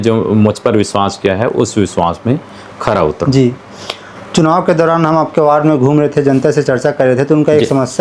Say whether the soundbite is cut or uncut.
uncut